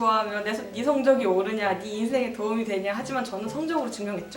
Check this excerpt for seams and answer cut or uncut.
uncut